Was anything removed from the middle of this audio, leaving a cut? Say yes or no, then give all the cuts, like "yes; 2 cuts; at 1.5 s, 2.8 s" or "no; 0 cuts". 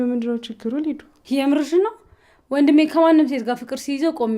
yes; 1 cut; at 1.1 s